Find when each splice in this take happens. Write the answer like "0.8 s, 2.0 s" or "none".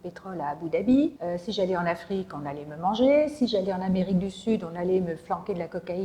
1.2 s